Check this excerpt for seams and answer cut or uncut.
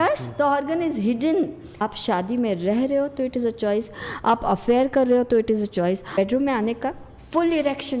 cut